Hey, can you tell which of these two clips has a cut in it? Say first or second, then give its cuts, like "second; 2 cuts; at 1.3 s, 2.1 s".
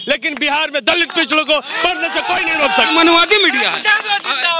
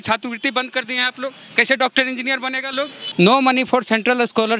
second; 1 cut; at 3.0 s